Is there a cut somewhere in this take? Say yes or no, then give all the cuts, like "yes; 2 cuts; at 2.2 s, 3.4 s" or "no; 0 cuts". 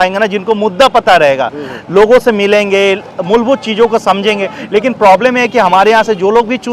no; 0 cuts